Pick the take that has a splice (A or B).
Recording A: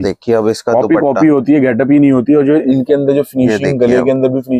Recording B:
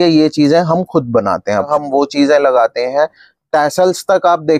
B